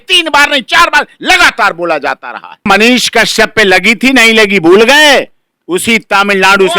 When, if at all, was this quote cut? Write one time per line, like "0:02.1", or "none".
0:02.7